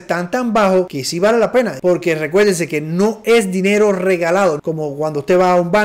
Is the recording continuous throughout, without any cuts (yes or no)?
no